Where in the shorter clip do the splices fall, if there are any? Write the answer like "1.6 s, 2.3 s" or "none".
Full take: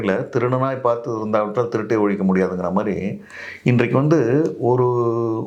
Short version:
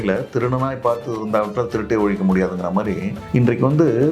3.1 s